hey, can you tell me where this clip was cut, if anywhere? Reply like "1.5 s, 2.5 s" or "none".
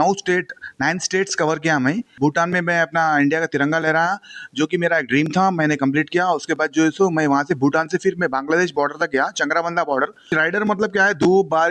2.1 s, 10.3 s